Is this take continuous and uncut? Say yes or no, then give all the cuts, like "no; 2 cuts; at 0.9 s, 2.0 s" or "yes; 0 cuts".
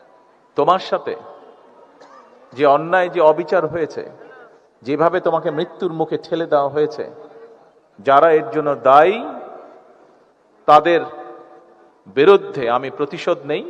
yes; 0 cuts